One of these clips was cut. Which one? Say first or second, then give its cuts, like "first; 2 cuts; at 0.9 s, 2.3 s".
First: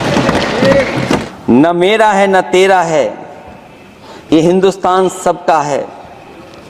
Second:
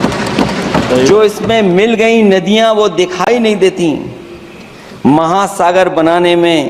first; 1 cut; at 1.3 s